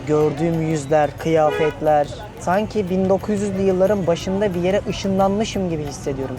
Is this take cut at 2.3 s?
yes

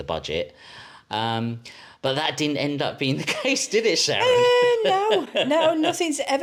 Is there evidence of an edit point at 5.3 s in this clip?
no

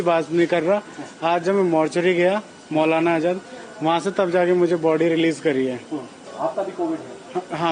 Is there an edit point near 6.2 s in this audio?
yes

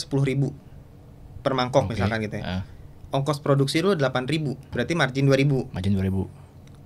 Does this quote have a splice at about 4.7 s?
yes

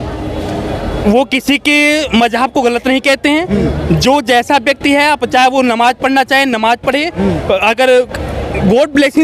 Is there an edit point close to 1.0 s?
no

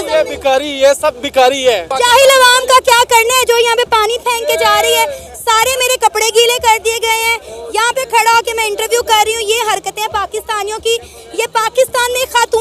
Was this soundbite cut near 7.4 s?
no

